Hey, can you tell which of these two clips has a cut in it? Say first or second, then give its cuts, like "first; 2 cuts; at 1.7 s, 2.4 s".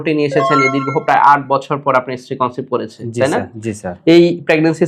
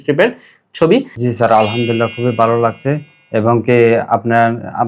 second; 1 cut; at 1.1 s